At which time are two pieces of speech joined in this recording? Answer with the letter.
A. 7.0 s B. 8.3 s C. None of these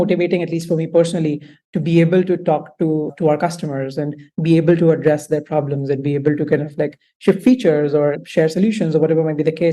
C